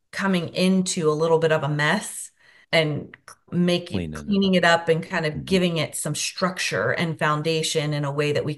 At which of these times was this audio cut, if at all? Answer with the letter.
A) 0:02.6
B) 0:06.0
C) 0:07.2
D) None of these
A